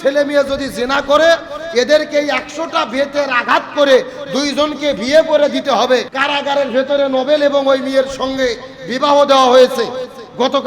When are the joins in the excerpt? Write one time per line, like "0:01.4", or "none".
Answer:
0:06.1